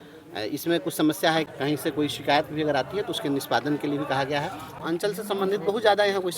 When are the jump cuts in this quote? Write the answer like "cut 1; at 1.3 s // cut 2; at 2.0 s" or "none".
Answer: cut 1; at 1.5 s // cut 2; at 4.8 s